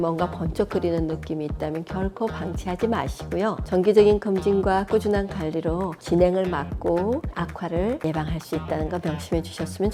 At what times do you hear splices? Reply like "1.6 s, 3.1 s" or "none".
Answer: none